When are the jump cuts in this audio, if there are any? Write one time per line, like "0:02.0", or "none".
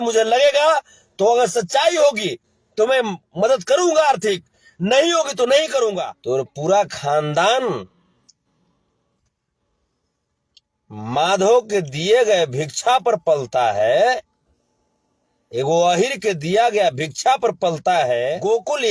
0:06.1
0:17.9